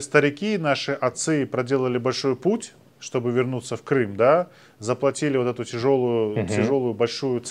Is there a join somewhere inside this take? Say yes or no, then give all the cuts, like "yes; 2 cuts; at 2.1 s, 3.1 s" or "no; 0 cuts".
no; 0 cuts